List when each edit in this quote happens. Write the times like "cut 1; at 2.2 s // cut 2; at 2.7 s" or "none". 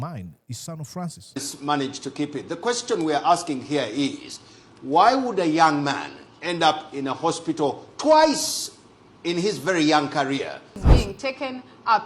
cut 1; at 10.7 s